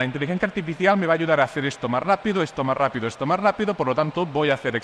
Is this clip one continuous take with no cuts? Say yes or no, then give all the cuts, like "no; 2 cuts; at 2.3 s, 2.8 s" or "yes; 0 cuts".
yes; 0 cuts